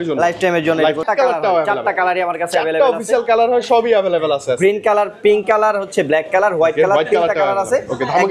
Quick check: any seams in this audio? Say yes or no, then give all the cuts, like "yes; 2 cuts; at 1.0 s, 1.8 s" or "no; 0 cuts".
yes; 1 cut; at 1.0 s